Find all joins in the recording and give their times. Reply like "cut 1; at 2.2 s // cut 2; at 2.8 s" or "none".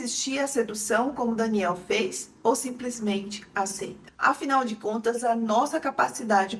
cut 1; at 4.0 s